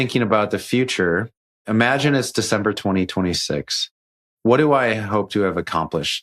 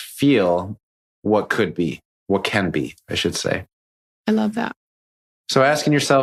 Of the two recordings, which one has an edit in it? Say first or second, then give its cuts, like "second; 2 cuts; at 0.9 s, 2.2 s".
first; 2 cuts; at 1.6 s, 4.3 s